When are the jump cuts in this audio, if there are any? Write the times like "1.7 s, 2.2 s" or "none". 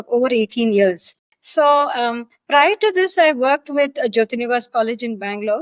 none